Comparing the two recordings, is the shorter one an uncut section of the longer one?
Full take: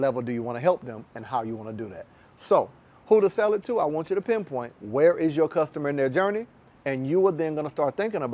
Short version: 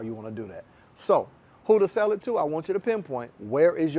yes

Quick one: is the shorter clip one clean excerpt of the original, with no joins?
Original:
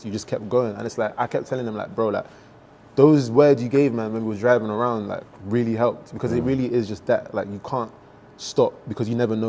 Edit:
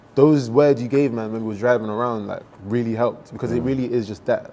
yes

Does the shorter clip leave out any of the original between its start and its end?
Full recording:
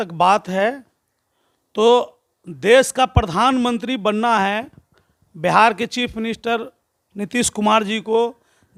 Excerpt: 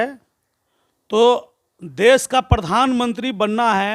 no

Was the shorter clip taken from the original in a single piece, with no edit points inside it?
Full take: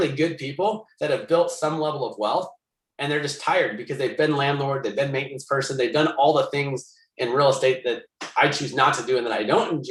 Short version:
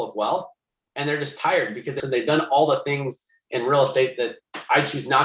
no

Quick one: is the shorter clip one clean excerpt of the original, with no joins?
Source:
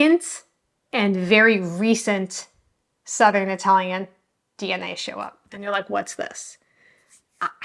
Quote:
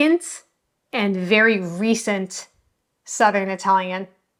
yes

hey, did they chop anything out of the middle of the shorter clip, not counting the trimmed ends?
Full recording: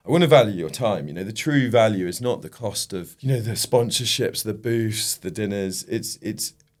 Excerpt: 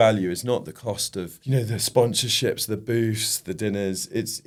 no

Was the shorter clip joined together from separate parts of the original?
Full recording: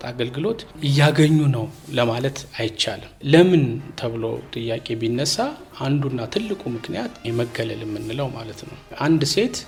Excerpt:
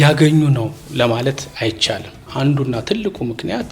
yes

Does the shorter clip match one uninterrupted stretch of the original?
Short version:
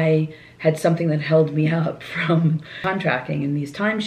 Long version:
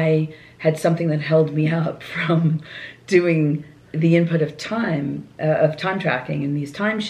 no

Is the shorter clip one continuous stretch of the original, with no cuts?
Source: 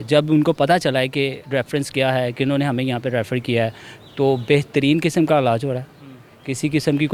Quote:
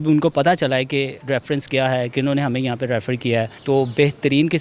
no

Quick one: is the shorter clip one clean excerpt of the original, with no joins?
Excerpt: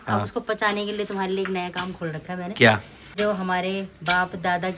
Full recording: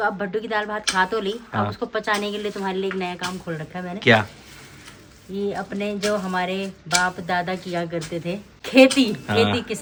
no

